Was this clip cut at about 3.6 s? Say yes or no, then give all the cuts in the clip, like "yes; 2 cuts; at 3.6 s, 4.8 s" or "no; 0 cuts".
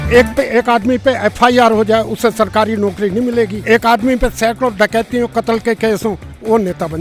yes; 1 cut; at 3.6 s